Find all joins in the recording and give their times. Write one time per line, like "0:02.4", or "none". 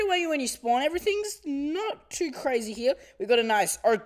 0:00.9